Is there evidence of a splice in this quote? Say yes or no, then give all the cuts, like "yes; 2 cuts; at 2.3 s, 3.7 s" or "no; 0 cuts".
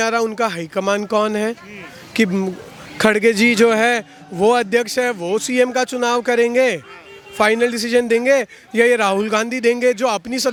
no; 0 cuts